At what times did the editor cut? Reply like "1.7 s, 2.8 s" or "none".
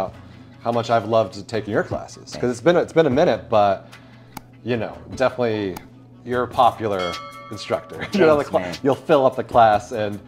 none